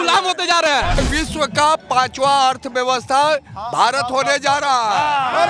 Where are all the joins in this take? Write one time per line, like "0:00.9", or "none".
0:01.0

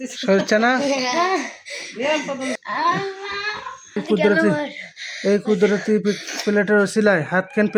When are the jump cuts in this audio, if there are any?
0:02.6
0:04.0

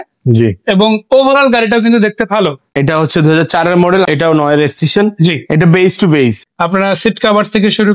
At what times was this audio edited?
0:02.6
0:04.1
0:06.4

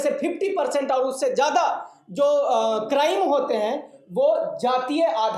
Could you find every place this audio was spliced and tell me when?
none

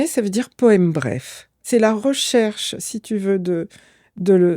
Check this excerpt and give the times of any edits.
0:01.6

